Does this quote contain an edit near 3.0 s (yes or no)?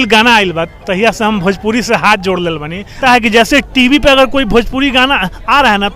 yes